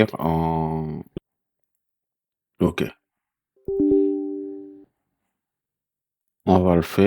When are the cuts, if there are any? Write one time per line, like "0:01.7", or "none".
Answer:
0:01.2